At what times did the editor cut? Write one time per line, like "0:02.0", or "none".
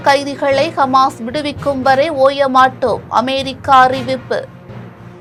none

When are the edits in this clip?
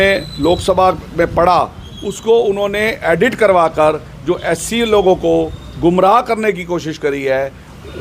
none

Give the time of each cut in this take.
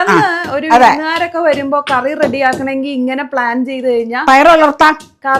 none

